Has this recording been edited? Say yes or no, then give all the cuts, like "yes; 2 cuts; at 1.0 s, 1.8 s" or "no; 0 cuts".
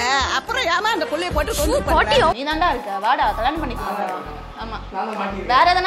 yes; 1 cut; at 2.4 s